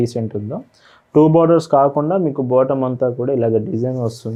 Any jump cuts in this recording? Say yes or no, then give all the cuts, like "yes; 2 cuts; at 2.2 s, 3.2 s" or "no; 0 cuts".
no; 0 cuts